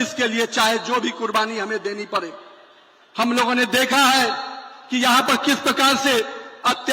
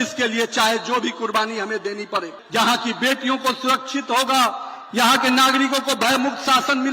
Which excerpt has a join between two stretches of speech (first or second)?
second